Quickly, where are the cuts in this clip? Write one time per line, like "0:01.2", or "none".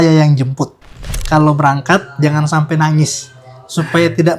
0:01.1